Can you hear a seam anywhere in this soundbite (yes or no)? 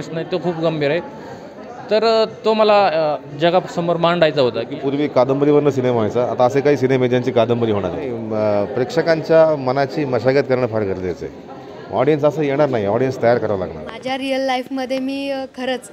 yes